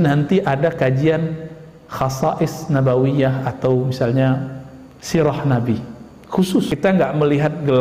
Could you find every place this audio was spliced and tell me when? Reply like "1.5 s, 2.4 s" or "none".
6.8 s